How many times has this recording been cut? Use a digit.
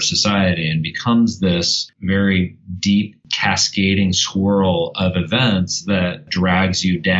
1